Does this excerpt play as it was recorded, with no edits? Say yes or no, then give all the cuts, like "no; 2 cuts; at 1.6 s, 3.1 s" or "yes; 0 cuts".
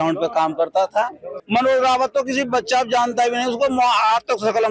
no; 1 cut; at 1.4 s